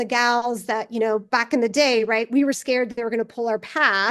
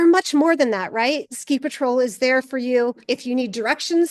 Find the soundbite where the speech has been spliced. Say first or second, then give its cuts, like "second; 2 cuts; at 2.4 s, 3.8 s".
second; 2 cuts; at 1.2 s, 3.0 s